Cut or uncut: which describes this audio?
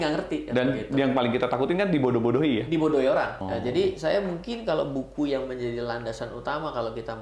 cut